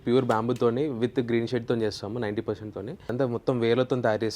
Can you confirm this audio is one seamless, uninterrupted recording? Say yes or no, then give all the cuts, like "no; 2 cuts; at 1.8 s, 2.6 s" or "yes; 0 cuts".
no; 1 cut; at 3.1 s